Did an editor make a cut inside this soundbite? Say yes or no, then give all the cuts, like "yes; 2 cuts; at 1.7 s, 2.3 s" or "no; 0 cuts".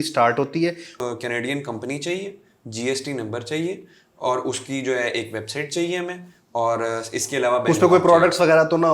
yes; 1 cut; at 0.9 s